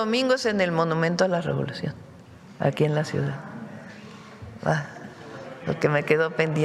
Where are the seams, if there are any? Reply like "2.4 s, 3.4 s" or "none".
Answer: none